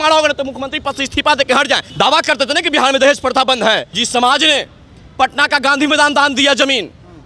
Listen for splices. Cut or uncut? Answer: cut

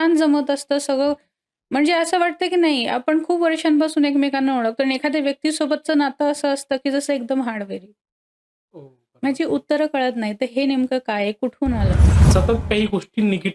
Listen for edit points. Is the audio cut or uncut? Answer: cut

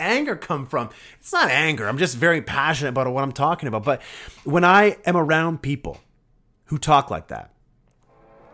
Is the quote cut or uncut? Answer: uncut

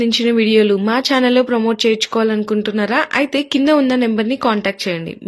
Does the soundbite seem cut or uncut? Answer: uncut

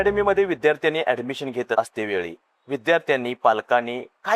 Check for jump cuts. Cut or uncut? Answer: cut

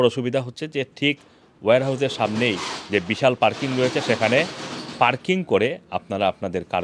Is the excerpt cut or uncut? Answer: uncut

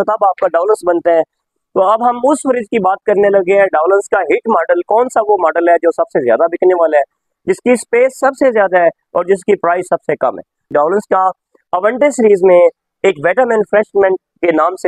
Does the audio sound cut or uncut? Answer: cut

